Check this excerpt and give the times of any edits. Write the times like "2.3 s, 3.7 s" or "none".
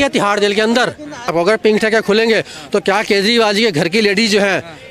1.3 s